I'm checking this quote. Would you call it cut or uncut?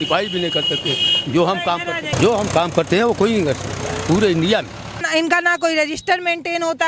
cut